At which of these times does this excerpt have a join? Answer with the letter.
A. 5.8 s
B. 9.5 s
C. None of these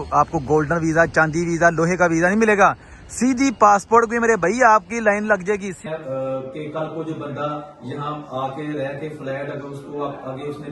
A